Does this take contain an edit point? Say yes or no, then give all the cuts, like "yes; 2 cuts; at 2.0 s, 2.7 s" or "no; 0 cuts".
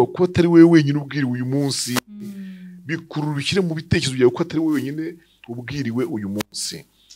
no; 0 cuts